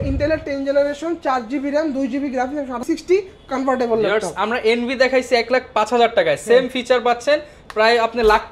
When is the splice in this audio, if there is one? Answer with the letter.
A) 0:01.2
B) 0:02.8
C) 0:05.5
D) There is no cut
B